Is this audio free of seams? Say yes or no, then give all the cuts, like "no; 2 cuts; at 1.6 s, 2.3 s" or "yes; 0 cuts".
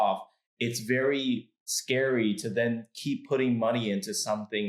yes; 0 cuts